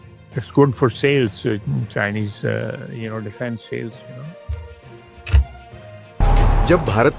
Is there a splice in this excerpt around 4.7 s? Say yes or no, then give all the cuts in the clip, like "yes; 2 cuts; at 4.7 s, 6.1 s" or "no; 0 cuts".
no; 1 cut; at 6.1 s